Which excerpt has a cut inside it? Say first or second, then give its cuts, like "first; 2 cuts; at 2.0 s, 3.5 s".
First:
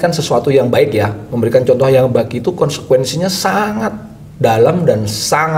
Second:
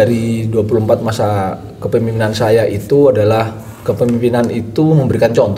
first; 1 cut; at 1.2 s